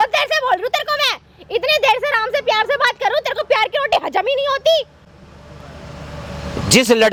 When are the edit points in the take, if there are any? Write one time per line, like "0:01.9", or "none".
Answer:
none